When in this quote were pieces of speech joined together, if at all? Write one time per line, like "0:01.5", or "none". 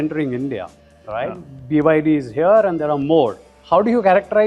none

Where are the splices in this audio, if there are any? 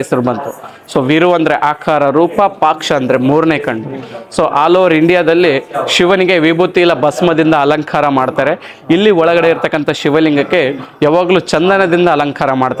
none

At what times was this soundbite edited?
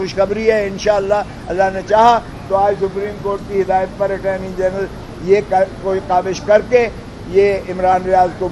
none

